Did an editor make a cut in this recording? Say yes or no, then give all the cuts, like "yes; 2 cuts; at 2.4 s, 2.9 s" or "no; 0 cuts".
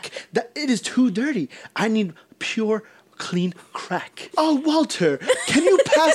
yes; 1 cut; at 4.2 s